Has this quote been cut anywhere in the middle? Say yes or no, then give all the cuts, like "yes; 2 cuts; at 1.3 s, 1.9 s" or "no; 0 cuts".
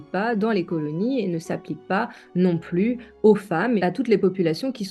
yes; 1 cut; at 3.8 s